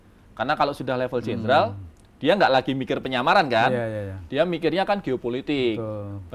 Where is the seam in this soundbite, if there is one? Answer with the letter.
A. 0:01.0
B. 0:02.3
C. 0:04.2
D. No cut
D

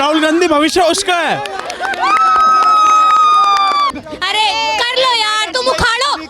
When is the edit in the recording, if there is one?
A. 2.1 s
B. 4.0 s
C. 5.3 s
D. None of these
B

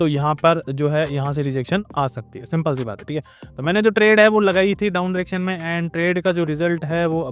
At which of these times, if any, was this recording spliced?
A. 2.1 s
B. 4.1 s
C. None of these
C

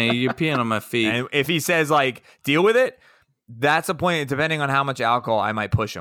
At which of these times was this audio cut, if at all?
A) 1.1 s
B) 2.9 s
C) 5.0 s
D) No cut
A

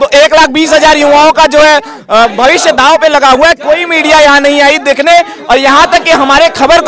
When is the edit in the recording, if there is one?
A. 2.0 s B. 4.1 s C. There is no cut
C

